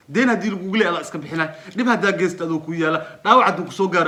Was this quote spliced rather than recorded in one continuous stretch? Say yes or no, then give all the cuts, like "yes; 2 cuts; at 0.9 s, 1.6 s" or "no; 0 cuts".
no; 0 cuts